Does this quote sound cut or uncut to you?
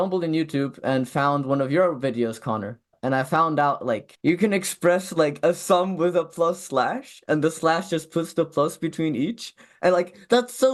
uncut